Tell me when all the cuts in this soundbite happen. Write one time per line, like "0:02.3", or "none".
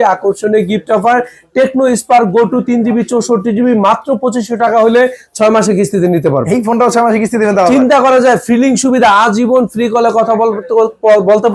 none